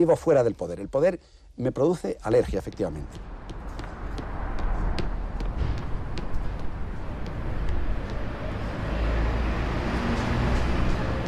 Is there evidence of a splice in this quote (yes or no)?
no